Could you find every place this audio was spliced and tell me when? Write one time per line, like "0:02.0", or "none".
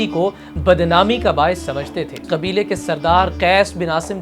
0:02.2